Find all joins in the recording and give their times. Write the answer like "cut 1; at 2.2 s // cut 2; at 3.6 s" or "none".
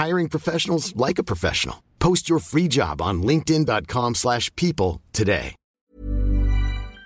cut 1; at 5.7 s